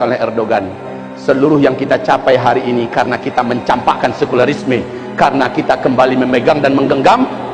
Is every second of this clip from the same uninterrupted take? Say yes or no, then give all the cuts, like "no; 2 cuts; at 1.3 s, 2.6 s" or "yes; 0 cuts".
yes; 0 cuts